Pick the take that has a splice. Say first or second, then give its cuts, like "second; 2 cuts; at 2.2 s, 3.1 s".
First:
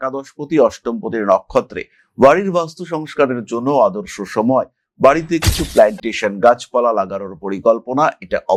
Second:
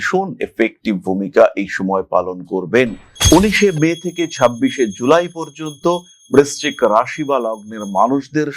second; 1 cut; at 3.1 s